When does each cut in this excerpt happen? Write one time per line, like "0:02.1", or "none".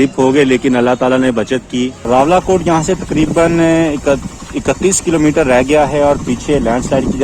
0:02.0